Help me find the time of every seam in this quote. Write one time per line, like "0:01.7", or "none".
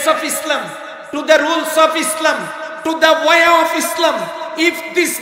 none